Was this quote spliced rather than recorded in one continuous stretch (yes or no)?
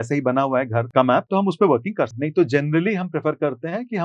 yes